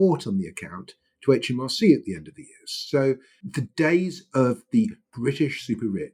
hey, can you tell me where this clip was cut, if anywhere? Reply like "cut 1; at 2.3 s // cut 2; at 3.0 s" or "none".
none